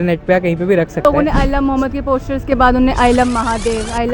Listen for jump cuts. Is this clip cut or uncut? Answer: cut